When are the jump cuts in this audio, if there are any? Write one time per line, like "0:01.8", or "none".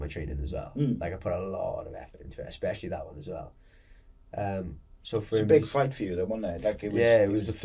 none